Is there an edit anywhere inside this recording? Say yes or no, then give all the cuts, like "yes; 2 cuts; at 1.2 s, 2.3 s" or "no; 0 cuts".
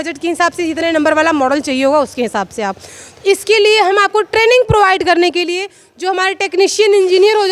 no; 0 cuts